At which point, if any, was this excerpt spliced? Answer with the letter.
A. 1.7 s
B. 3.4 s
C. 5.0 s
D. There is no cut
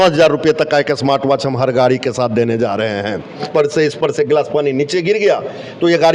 B